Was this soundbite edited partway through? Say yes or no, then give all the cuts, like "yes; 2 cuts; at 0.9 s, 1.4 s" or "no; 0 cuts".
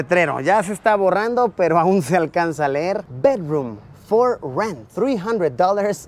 no; 0 cuts